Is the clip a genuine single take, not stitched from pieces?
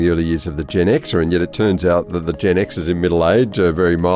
yes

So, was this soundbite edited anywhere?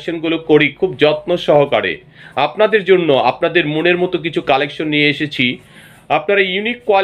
no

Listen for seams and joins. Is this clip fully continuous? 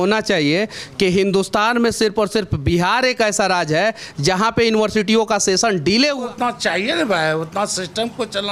no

